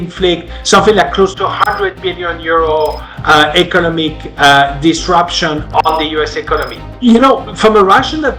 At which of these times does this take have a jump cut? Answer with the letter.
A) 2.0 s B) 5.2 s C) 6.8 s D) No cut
C